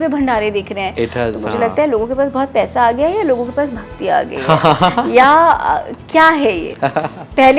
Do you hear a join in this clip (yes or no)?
no